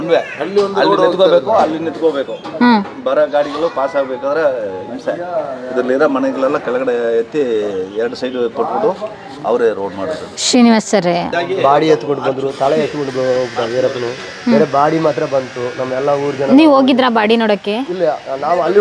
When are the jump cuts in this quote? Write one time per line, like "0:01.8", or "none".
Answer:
0:11.3